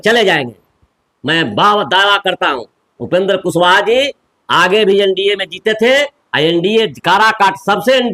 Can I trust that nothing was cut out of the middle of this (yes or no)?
yes